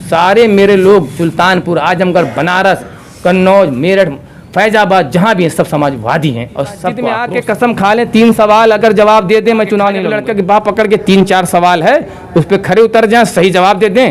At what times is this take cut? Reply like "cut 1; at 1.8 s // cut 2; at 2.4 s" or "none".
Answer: cut 1; at 7.2 s // cut 2; at 10.1 s